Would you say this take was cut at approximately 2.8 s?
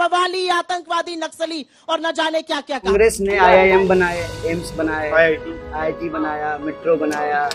yes; 1 cut; at 2.8 s

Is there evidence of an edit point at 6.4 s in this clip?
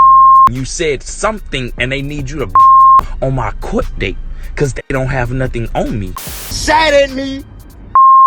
yes; 1 cut; at 6.4 s

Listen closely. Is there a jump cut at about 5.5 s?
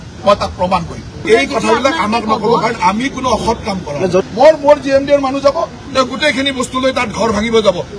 no; 2 cuts; at 1.2 s, 4.2 s

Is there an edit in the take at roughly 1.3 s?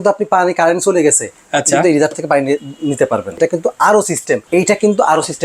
no; 2 cuts; at 3.4 s, 4.4 s

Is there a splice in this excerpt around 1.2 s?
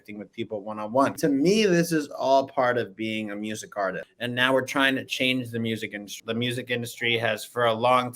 yes; 3 cuts; at 1.2 s, 4.1 s, 6.1 s

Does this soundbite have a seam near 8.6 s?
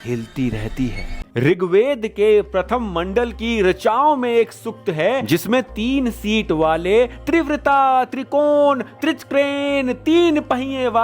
no; 1 cut; at 1.2 s

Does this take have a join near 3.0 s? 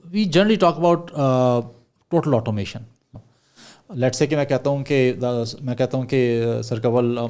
yes; 1 cut; at 3.0 s

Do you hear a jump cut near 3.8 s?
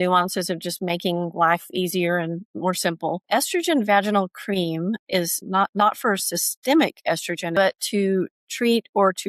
no; 1 cut; at 7.5 s

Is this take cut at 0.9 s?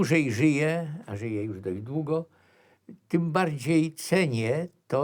no; 0 cuts

